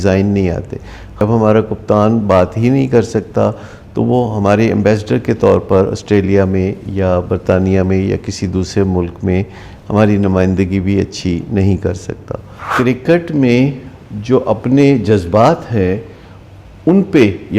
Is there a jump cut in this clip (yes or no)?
yes